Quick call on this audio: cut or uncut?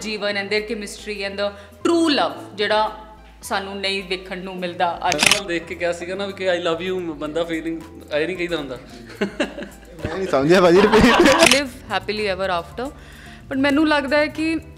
cut